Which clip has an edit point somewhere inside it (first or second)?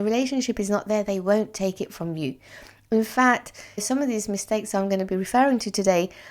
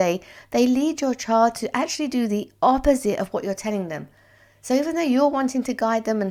first